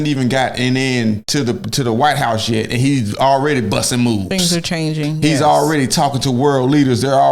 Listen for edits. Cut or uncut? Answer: uncut